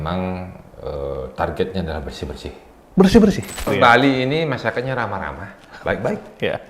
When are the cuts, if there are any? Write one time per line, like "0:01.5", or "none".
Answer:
0:03.7